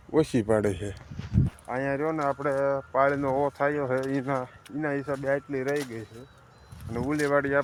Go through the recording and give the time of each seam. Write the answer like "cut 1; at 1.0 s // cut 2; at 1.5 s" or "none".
none